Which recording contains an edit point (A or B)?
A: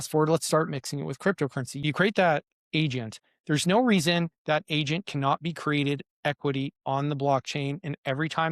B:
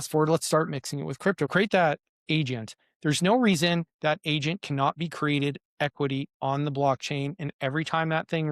B